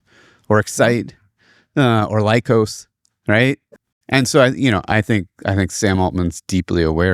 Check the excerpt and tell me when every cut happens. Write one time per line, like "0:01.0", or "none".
0:03.8